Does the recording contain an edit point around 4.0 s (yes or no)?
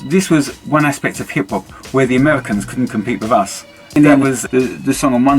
yes